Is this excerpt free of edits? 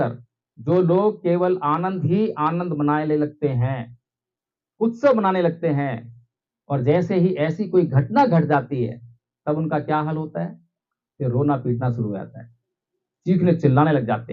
yes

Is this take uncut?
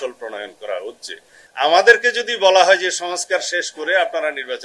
no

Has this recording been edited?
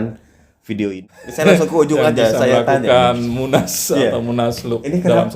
yes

